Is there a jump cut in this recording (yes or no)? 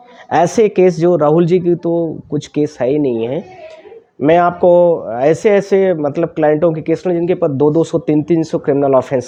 no